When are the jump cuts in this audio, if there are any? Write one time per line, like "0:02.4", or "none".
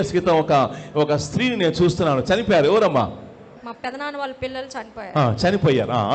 0:03.5